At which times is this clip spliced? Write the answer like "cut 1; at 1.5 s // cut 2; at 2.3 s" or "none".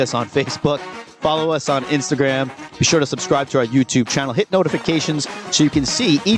none